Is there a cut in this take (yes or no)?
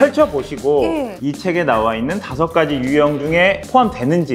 yes